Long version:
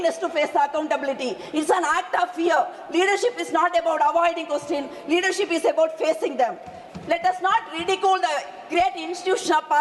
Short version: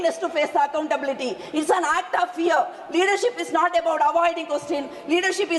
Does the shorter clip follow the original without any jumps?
yes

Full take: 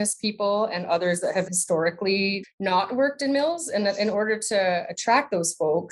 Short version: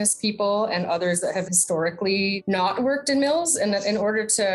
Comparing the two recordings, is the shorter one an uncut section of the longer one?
no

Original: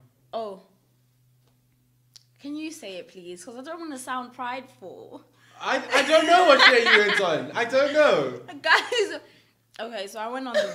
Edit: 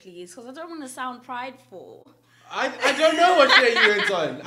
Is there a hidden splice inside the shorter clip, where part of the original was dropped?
no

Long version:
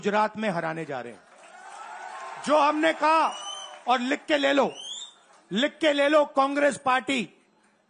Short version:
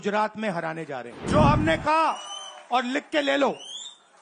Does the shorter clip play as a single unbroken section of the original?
no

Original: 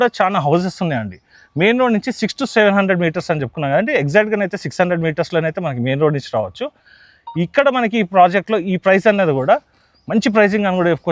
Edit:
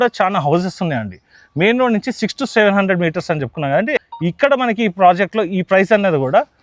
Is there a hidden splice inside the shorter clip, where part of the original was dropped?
yes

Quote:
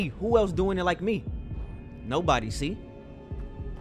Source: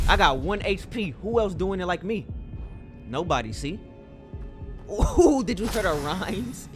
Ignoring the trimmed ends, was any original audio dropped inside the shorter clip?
no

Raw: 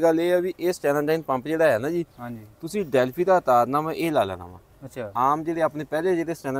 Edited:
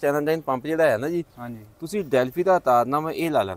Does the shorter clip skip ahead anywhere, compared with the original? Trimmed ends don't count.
no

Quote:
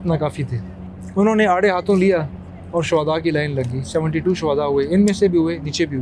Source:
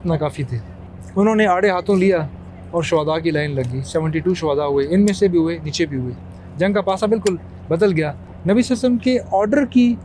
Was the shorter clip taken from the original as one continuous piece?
yes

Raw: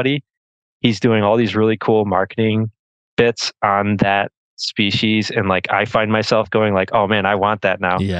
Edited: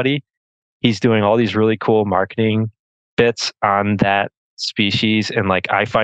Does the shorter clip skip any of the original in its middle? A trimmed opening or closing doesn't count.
no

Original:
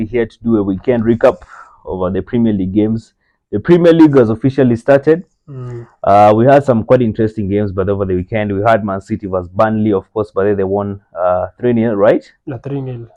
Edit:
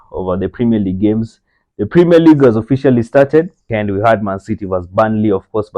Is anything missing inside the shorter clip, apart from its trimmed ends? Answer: yes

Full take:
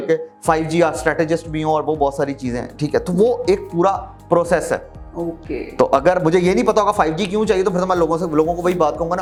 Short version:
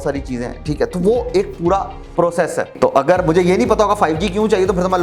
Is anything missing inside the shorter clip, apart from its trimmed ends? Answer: yes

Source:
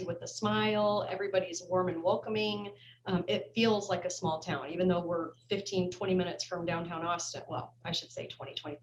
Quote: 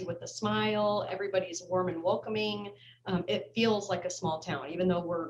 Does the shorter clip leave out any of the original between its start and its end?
no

